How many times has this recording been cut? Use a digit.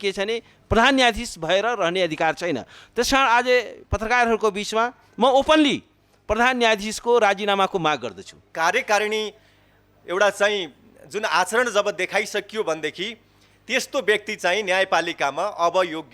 1